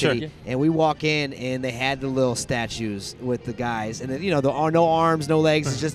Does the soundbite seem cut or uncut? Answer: uncut